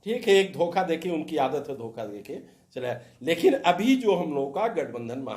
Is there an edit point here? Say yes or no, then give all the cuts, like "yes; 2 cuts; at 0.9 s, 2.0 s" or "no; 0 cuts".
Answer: no; 0 cuts